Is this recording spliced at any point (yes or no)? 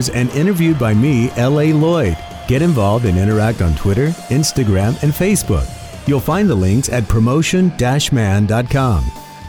no